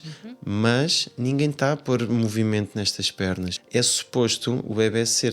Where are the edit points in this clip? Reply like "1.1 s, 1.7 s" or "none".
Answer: 3.5 s